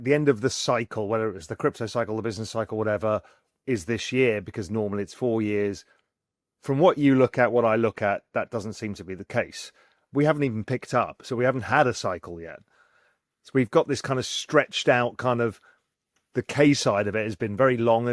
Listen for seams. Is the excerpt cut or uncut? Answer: uncut